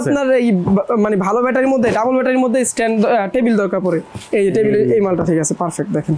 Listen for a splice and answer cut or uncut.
uncut